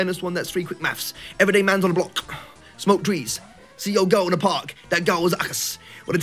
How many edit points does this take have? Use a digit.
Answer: 0